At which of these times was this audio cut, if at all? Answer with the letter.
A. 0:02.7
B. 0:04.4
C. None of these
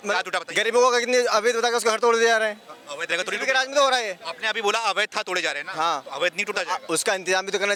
C